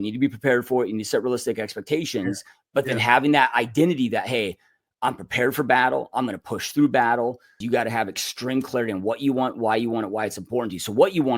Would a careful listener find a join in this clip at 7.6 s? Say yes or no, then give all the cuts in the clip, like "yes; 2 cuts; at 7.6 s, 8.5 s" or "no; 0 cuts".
yes; 1 cut; at 7.6 s